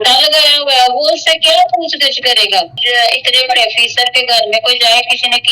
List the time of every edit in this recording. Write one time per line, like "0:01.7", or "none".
0:02.8